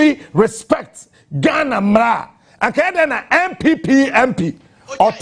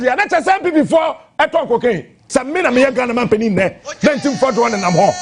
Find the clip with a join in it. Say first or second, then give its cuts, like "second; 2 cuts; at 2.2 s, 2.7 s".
second; 1 cut; at 2.2 s